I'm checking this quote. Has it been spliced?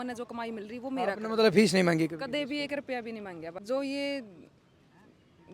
yes; 1 cut; at 3.6 s

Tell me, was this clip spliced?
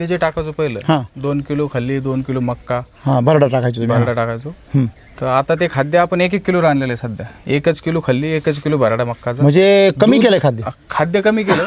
no; 0 cuts

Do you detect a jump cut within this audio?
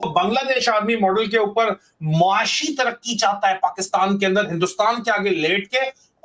no; 0 cuts

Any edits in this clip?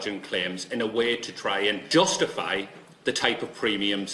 yes; 1 cut; at 1.8 s

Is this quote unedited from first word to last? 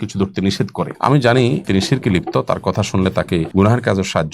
no; 3 cuts; at 0.9 s, 1.6 s, 3.5 s

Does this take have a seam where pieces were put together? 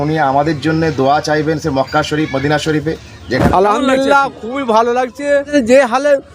yes; 2 cuts; at 3.4 s, 5.5 s

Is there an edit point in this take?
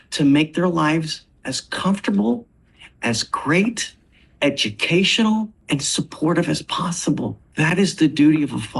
yes; 2 cuts; at 5.6 s, 7.4 s

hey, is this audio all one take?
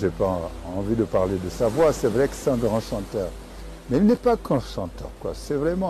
yes; 0 cuts

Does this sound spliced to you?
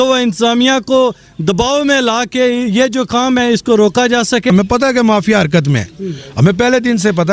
yes; 1 cut; at 4.5 s

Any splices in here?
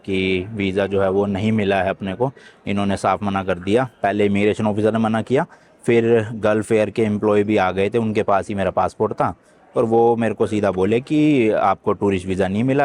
no; 0 cuts

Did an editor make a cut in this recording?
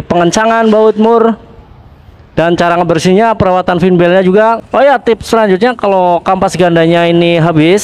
yes; 1 cut; at 4.6 s

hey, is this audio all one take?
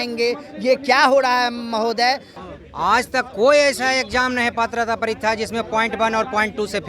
no; 1 cut; at 2.4 s

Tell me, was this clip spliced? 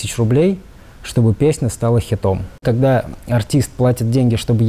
yes; 1 cut; at 2.6 s

